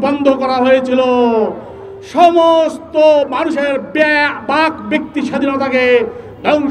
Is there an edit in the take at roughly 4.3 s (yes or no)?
no